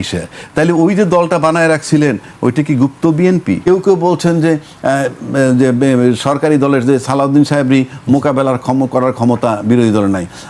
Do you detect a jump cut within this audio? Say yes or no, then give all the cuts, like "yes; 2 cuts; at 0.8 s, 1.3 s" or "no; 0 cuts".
yes; 1 cut; at 3.6 s